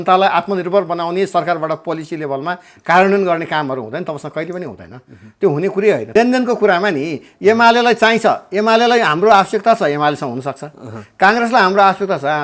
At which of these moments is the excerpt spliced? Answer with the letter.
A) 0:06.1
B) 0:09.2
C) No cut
A